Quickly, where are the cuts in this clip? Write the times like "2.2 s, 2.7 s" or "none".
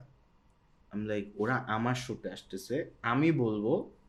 none